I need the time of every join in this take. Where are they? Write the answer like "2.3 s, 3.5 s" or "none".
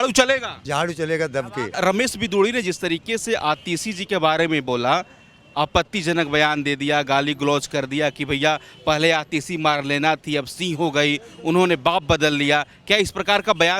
1.7 s

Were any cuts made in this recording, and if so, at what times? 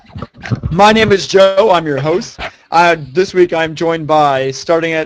none

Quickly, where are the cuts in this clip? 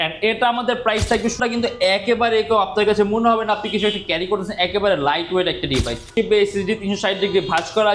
1.4 s, 6.1 s

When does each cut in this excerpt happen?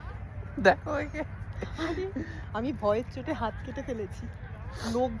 none

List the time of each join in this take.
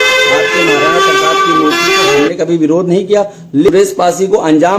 3.7 s

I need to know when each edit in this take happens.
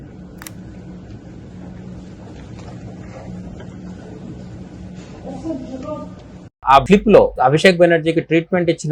none

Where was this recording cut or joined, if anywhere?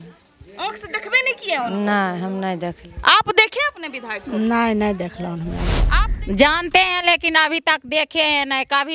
5.8 s

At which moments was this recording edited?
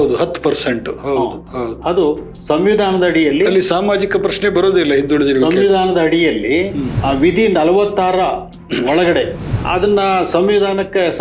6.9 s, 9.5 s

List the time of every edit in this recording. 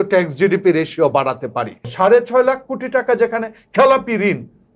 1.9 s

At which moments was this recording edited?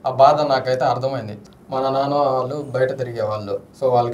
1.4 s

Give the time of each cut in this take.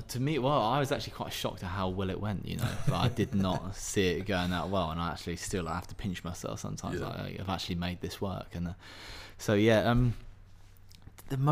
none

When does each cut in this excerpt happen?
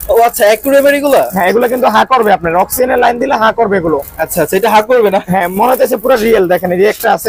none

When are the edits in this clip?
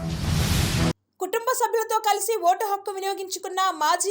0.9 s

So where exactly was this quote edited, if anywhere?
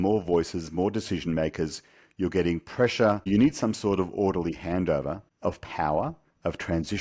3.3 s

